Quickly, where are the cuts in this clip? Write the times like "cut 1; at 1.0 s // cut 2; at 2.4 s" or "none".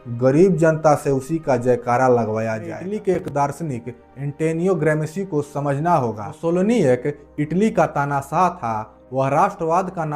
cut 1; at 2.8 s // cut 2; at 6.3 s